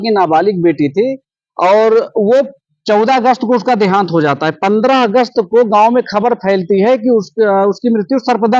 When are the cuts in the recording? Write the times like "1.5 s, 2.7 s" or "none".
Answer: none